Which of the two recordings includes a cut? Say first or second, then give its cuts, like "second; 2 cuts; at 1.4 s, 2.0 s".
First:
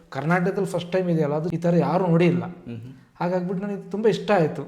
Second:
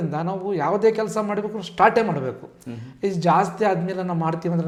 first; 1 cut; at 1.5 s